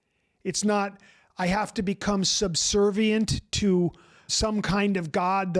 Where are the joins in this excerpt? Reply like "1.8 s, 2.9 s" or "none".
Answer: 4.3 s